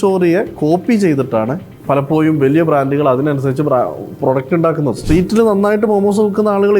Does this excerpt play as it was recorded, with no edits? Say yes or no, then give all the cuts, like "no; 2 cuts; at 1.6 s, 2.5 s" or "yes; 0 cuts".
no; 2 cuts; at 1.7 s, 5.0 s